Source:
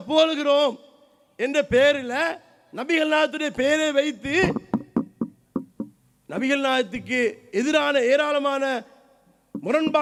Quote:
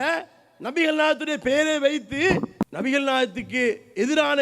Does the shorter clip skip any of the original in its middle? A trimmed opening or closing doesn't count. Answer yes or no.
yes